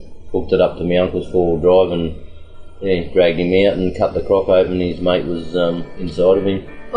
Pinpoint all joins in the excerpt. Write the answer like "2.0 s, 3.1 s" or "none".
5.9 s

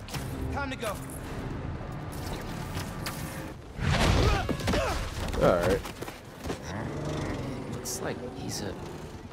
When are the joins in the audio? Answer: 6.6 s

